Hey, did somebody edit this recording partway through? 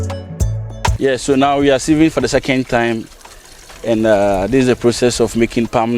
yes; 1 cut; at 1.0 s

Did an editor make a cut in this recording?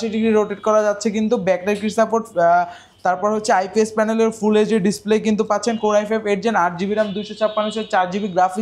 no; 0 cuts

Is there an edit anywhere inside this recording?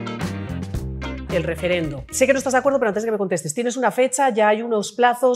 yes; 2 cuts; at 1.2 s, 2.1 s

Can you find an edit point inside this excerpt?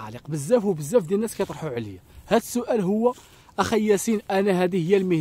no; 0 cuts

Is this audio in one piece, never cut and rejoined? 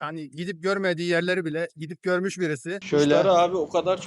no; 1 cut; at 2.8 s

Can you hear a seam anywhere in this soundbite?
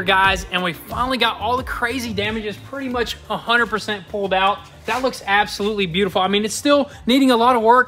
no; 0 cuts

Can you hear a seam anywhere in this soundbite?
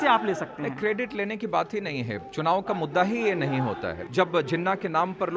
yes; 1 cut; at 4.0 s

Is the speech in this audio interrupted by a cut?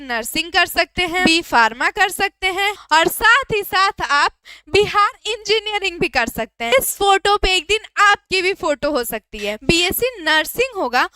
yes; 4 cuts; at 1.2 s, 2.8 s, 6.7 s, 9.6 s

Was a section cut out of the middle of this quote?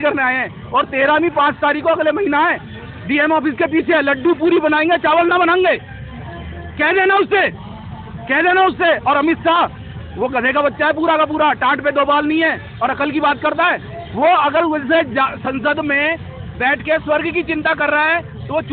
no; 0 cuts

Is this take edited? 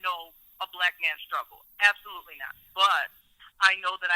yes; 1 cut; at 2.6 s

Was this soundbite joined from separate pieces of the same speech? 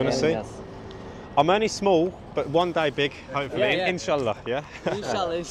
no; 0 cuts

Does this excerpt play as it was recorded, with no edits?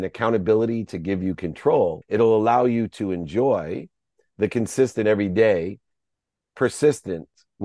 no; 1 cut; at 2.0 s

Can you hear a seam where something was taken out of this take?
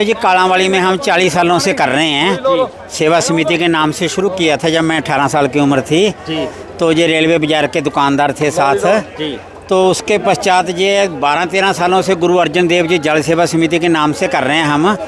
no; 0 cuts

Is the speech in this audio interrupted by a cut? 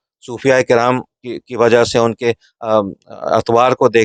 no; 0 cuts

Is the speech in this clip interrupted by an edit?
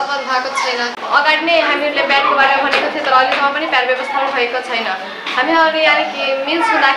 yes; 1 cut; at 0.9 s

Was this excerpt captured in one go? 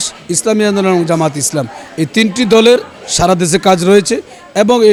yes; 0 cuts

